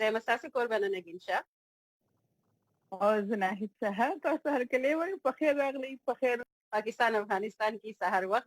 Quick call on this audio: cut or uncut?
cut